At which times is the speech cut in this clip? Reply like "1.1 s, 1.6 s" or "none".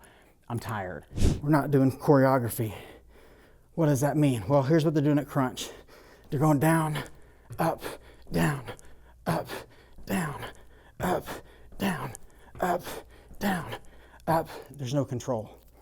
1.2 s